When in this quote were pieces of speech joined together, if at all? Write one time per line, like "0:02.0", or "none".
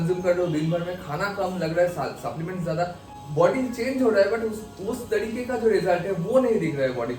0:03.0